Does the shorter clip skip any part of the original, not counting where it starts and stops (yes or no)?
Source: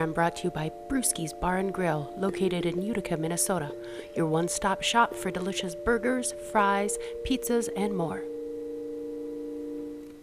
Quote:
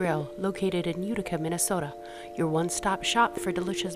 no